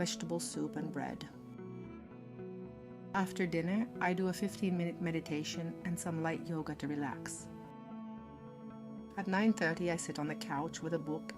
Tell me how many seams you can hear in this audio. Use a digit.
4